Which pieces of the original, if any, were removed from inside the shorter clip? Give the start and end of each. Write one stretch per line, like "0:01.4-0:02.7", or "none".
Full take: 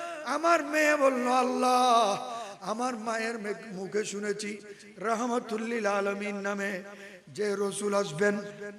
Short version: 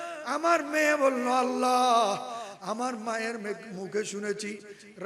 none

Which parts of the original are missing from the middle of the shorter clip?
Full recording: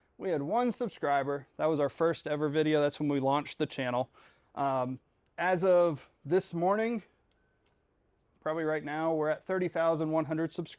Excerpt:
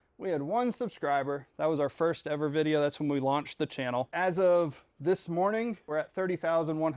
0:04.1-0:05.4
0:07.2-0:09.2

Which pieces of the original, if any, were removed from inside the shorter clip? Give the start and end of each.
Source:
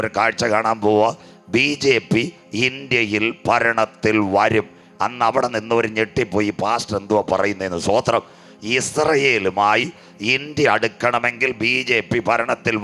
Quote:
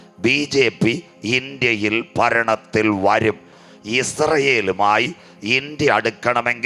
0:04.9-0:08.3

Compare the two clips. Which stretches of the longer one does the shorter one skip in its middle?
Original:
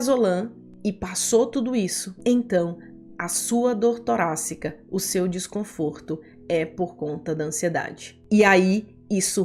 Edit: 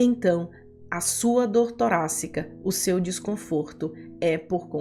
none

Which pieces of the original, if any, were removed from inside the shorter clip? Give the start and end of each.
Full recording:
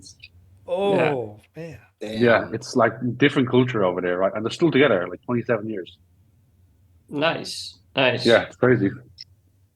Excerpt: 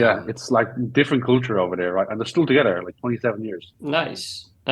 0:05.9-0:07.0

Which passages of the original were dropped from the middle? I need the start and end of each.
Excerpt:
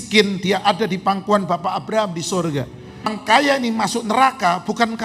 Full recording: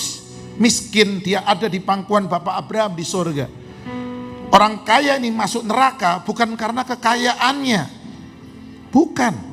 0:04.0-0:04.7

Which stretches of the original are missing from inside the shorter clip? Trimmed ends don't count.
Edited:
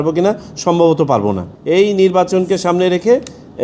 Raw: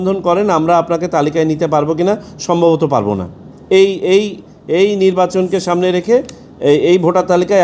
0:03.3-0:04.5

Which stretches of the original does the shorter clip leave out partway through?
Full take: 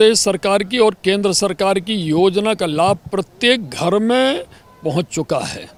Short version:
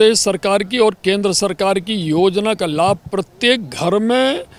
none

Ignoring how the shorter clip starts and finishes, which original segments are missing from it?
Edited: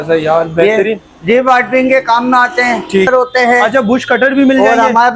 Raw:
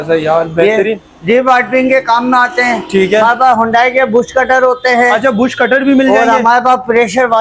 0:03.1-0:04.6

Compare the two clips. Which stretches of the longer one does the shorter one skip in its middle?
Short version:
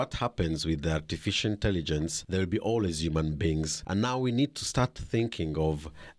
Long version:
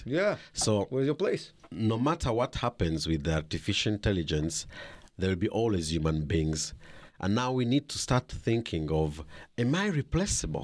0:04.6-0:05.1
0:06.7-0:07.1

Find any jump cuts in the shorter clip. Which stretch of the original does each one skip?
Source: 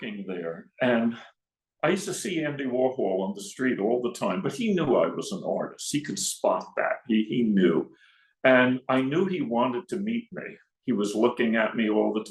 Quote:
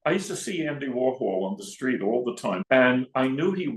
0:04.4-0:08.3

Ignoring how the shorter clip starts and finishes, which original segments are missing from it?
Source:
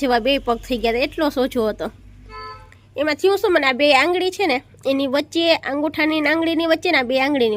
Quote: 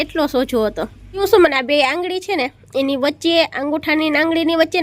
0:02.2-0:03.3

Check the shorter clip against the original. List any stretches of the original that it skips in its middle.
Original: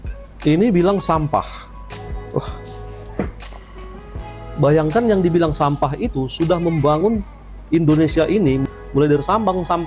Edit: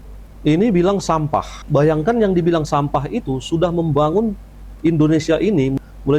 0:01.6-0:04.4

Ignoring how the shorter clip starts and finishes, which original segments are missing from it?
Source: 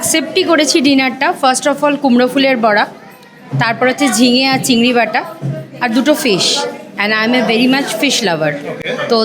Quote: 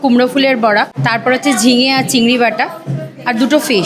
0:03.0-0:03.5

